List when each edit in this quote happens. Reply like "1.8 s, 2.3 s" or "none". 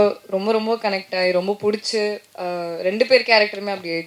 none